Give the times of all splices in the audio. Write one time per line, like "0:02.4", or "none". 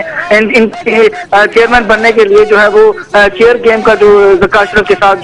0:00.9